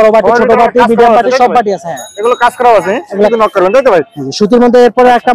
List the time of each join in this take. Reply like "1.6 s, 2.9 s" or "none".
3.3 s